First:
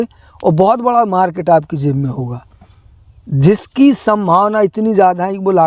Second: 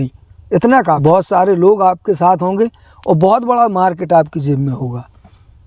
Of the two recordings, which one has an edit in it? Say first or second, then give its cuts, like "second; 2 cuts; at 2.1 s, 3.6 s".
second; 1 cut; at 1.0 s